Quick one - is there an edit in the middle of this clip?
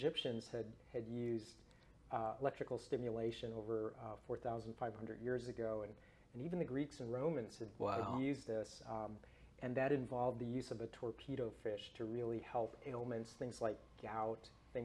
no; 0 cuts

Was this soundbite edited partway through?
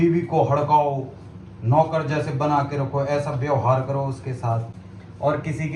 no; 0 cuts

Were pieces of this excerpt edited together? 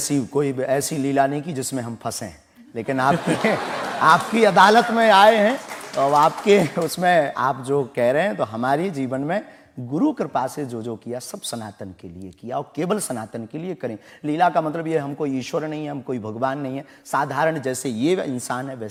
no; 0 cuts

